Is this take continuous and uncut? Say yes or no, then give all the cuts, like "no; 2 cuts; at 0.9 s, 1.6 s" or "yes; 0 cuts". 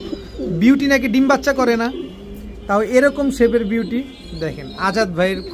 yes; 0 cuts